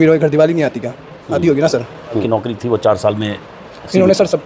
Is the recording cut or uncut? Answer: cut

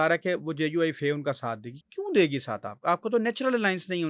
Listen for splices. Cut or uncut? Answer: uncut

